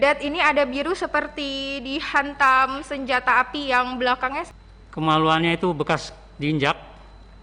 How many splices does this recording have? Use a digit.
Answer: 1